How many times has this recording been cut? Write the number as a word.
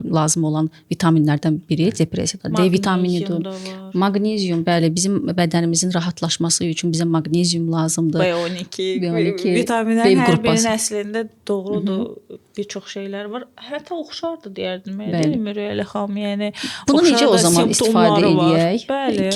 zero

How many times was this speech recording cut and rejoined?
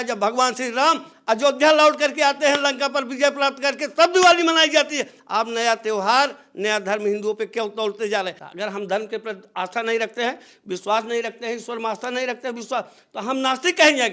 one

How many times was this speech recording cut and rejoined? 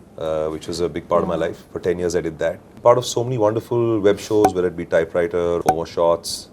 two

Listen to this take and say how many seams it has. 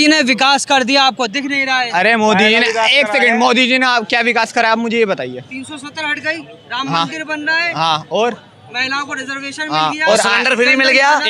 zero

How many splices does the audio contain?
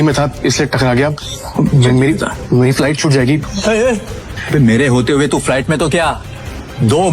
two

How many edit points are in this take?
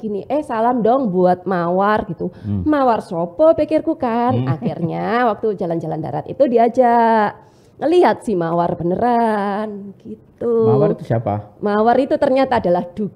zero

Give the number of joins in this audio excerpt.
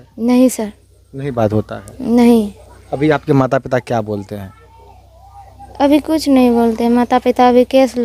zero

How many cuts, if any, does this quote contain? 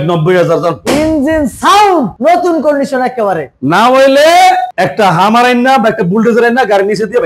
zero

